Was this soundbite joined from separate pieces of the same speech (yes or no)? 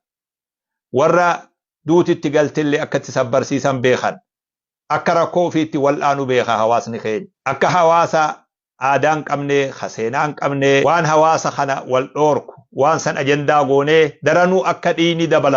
yes